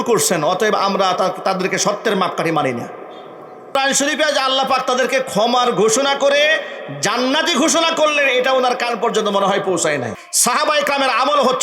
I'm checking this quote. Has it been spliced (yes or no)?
yes